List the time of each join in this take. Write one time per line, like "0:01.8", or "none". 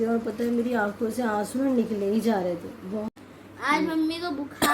0:03.1